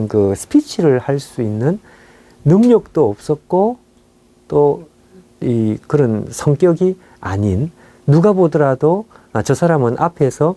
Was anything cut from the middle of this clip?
no; 0 cuts

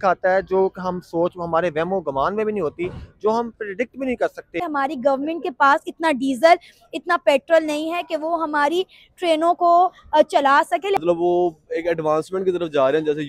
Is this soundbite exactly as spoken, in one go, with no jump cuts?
no; 2 cuts; at 4.6 s, 11.0 s

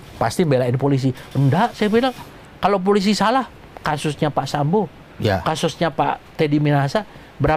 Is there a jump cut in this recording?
no; 0 cuts

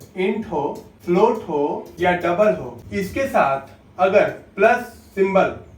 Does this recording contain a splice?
yes; 3 cuts; at 0.9 s, 1.9 s, 2.8 s

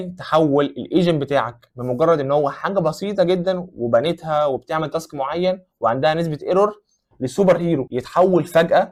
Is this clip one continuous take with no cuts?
yes; 0 cuts

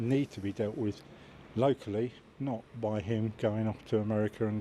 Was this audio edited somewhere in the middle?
no; 0 cuts

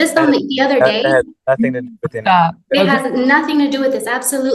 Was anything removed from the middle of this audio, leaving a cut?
no; 0 cuts

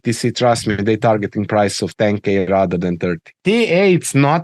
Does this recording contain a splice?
yes; 1 cut; at 3.4 s

